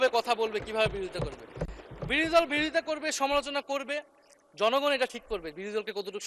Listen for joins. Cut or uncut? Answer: uncut